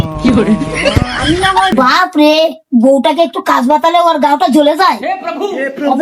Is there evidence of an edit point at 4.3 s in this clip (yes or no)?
no